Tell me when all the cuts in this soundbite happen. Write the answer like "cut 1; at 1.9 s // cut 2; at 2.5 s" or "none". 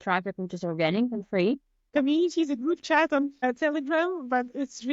cut 1; at 1.9 s // cut 2; at 3.4 s